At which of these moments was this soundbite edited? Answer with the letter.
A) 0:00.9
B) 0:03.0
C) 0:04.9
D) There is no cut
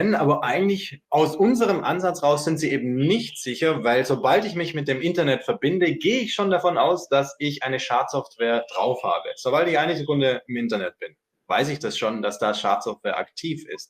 A